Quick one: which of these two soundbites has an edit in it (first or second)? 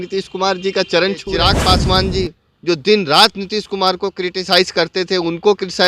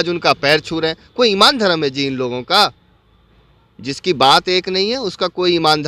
first